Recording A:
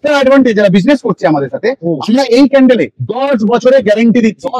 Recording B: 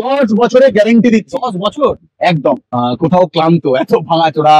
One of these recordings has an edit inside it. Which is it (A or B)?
B